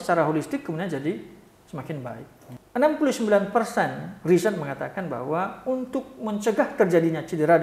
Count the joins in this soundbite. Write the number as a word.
one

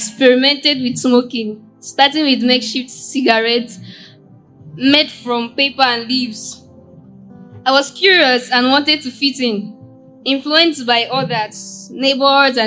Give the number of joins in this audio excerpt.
zero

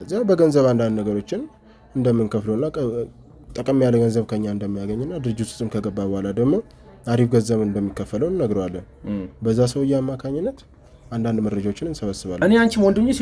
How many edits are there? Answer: one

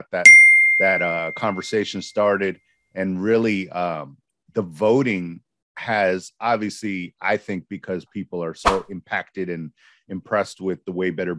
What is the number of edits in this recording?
zero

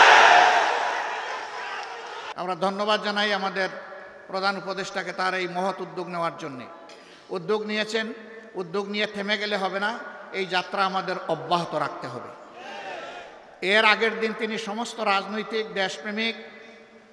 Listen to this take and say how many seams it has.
one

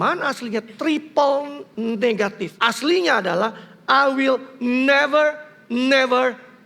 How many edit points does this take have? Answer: two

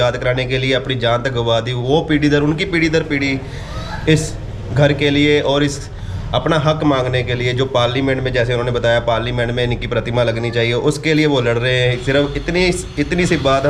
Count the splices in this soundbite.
zero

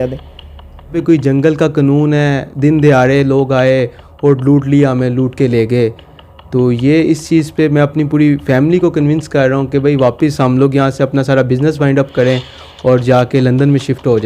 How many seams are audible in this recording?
one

